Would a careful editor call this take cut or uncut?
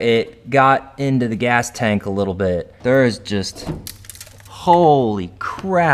cut